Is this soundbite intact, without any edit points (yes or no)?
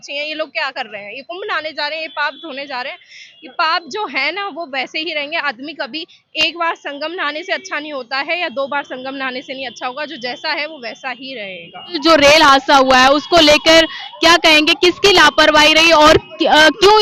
yes